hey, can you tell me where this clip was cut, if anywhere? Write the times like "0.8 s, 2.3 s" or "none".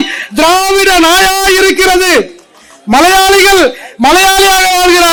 none